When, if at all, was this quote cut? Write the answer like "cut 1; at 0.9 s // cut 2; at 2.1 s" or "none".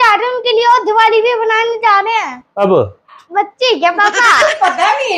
cut 1; at 2.4 s // cut 2; at 3.2 s